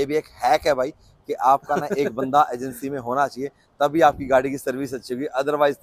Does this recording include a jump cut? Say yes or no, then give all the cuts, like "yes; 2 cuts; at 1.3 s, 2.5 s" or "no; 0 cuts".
no; 0 cuts